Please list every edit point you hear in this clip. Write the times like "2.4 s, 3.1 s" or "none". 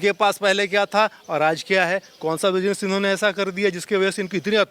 none